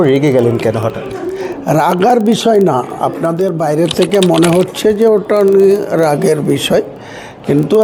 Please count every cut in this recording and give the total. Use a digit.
0